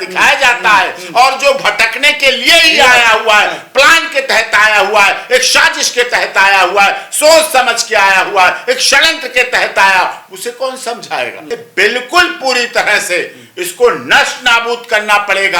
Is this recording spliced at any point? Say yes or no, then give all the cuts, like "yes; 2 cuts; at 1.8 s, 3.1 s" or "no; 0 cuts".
yes; 1 cut; at 11.4 s